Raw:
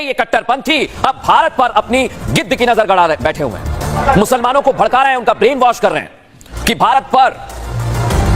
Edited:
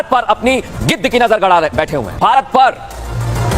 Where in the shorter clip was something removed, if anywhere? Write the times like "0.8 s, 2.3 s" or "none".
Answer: 2.1 s